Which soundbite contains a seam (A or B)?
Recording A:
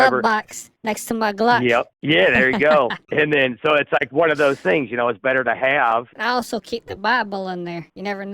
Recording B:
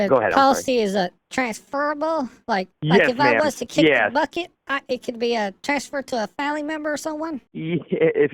A